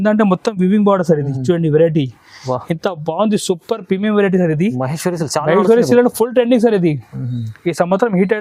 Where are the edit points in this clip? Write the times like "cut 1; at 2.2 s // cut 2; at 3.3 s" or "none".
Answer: none